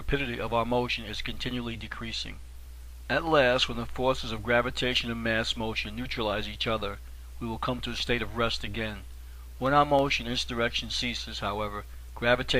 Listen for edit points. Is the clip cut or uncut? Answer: cut